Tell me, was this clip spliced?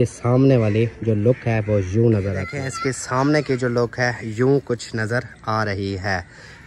yes; 1 cut; at 2.5 s

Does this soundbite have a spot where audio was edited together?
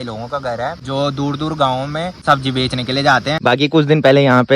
yes; 3 cuts; at 0.8 s, 2.1 s, 3.4 s

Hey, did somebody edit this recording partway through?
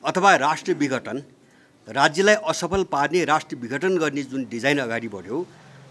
no; 0 cuts

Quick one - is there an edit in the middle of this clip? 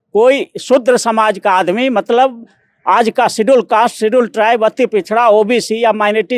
no; 0 cuts

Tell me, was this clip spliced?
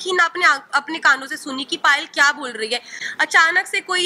yes; 1 cut; at 3.0 s

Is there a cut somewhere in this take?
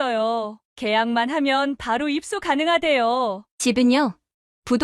yes; 1 cut; at 3.5 s

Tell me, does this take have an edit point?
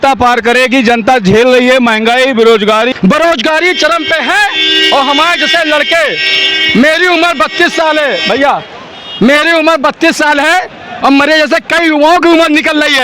yes; 1 cut; at 2.9 s

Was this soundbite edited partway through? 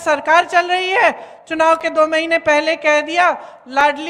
no; 0 cuts

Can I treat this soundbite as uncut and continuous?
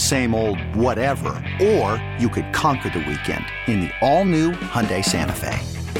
yes; 0 cuts

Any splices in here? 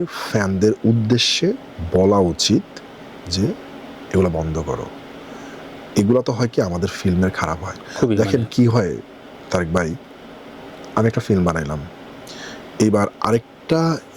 no; 0 cuts

